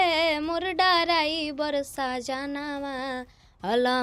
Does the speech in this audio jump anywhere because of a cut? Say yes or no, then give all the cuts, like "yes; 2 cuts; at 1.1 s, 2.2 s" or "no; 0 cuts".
no; 0 cuts